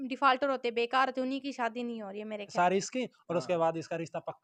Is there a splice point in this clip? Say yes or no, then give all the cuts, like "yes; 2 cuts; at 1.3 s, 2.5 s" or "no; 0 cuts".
yes; 1 cut; at 2.5 s